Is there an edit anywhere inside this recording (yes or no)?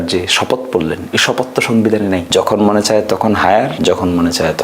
yes